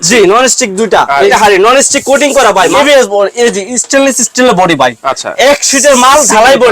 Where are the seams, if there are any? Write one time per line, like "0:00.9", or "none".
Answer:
0:01.3
0:02.8